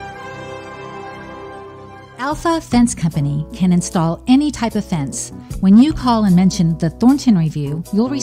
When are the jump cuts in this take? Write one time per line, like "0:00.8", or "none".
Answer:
0:02.1